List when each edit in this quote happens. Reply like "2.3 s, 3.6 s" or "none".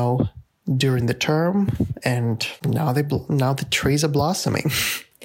2.5 s